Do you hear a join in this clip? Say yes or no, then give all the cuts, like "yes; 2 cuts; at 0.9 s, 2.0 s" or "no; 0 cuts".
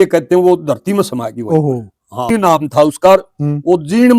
yes; 1 cut; at 2.3 s